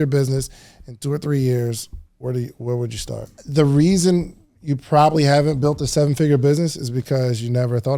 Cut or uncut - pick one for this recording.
cut